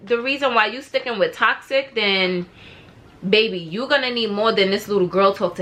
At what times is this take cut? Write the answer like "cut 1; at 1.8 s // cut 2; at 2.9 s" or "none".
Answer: none